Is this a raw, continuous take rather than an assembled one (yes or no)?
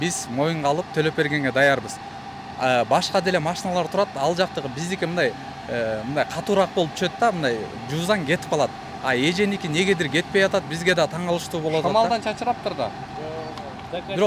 yes